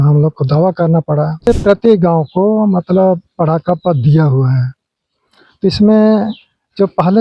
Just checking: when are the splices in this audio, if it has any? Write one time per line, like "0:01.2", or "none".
0:01.5